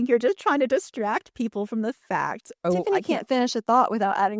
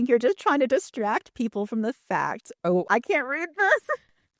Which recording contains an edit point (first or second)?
first